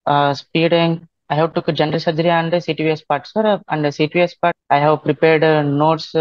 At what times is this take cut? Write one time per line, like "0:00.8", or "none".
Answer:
0:01.2
0:04.6

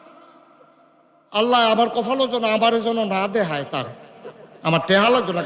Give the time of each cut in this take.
none

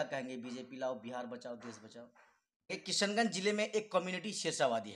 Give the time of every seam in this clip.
0:02.8

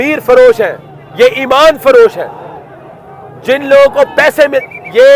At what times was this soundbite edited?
none

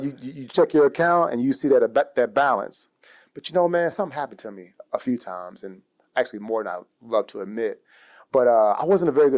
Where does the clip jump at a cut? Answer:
none

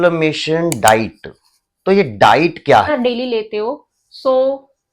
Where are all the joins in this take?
0:02.9

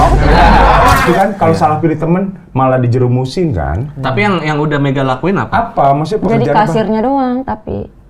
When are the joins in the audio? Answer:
0:01.0

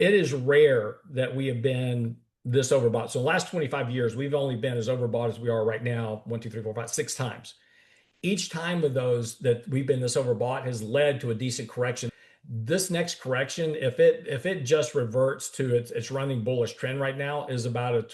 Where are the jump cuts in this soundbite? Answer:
0:12.1

